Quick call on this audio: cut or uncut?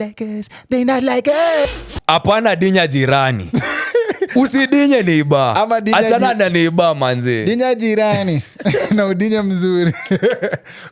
cut